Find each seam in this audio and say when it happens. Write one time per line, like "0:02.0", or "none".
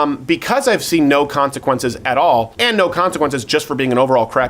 0:02.5